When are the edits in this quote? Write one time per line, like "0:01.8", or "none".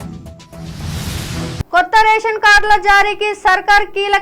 0:01.7